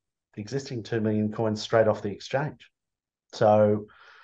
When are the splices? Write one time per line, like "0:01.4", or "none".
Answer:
none